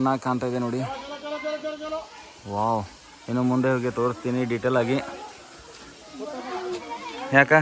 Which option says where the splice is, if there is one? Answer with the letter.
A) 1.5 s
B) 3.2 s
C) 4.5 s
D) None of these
D